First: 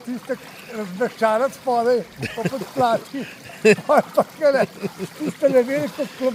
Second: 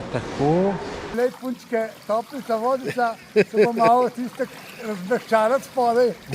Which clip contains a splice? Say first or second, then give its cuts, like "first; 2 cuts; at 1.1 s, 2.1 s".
second; 1 cut; at 1.1 s